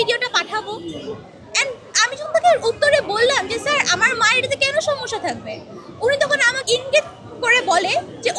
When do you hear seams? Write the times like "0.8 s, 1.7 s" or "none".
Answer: 6.6 s